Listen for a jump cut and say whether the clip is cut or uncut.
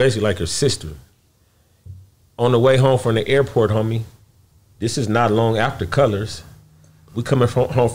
uncut